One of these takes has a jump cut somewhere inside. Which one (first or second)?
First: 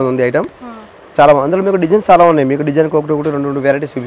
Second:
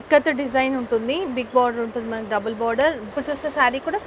second